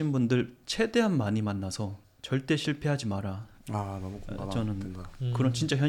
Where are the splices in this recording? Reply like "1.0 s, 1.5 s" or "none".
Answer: none